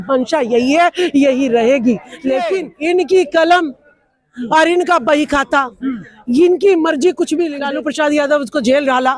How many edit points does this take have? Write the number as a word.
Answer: two